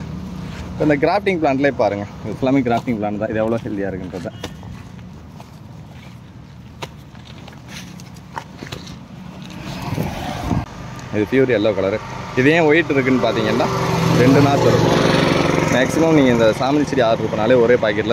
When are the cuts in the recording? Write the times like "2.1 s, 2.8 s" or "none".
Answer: 10.6 s